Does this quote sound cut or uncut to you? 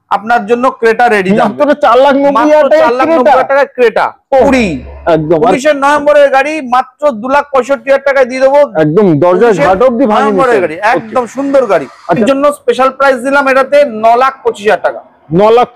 cut